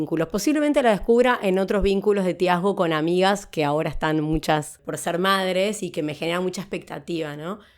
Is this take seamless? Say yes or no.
no